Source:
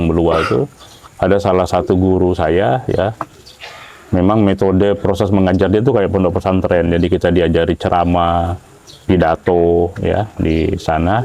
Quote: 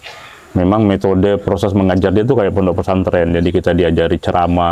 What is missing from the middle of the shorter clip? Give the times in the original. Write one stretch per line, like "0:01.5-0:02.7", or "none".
none